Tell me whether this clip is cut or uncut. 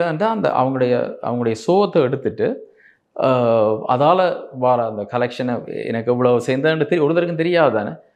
uncut